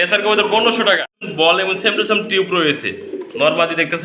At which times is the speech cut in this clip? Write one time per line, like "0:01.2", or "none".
0:01.2